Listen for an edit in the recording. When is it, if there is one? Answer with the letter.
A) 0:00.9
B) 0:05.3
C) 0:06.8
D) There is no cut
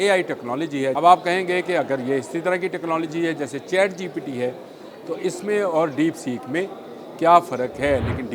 A